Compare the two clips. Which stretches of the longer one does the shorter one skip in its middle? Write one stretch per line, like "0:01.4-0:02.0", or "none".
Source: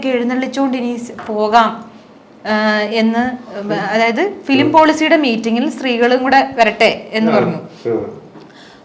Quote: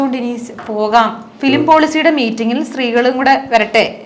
0:01.9-0:04.4